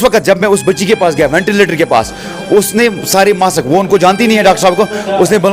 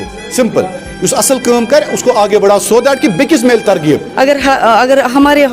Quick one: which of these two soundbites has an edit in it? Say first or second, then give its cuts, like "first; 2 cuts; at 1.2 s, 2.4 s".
second; 1 cut; at 4.1 s